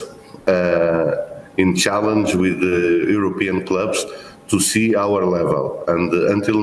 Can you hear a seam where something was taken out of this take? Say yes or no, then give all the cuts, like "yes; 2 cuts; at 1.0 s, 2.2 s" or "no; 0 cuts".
no; 0 cuts